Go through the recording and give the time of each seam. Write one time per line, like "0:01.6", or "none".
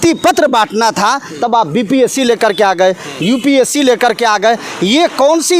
none